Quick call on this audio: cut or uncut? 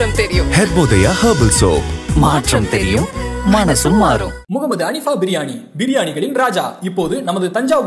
uncut